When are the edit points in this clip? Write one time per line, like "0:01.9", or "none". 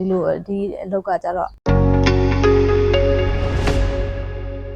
0:01.6